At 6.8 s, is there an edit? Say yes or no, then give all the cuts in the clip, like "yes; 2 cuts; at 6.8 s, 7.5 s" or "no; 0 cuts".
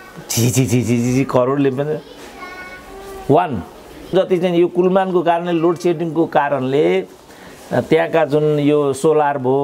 no; 1 cut; at 4.1 s